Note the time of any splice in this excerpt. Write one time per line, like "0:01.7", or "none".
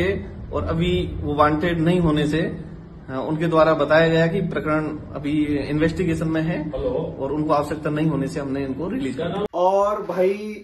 none

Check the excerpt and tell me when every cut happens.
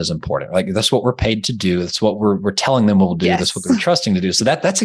none

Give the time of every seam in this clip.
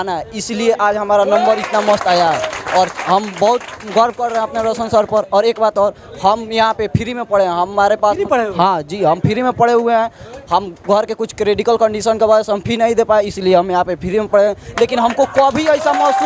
none

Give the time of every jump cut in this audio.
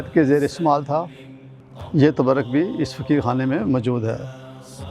none

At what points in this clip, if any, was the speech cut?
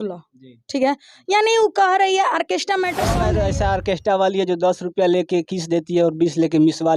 0:03.2

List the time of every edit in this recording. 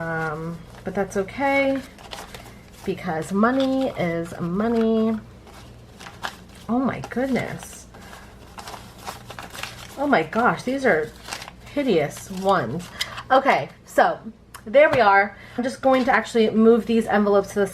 0:15.6

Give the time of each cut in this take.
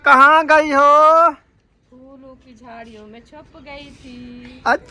none

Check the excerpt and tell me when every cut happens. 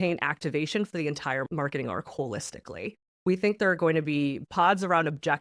0:01.5
0:03.0
0:04.4

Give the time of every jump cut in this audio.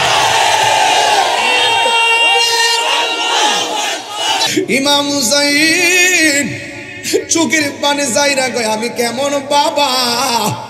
0:04.5

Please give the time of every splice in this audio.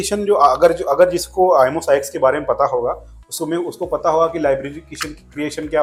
none

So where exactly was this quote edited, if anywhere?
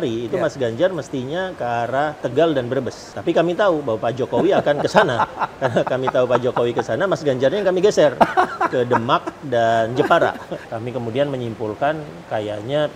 0:02.2
0:03.1
0:10.5

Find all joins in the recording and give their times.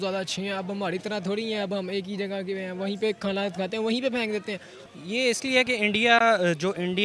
0:04.9

